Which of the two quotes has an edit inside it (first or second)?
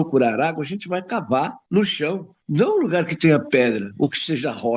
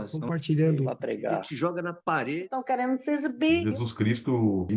first